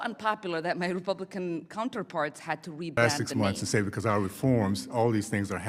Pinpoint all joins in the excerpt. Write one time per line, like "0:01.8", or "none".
0:03.0